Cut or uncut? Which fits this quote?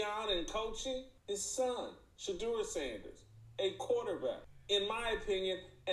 cut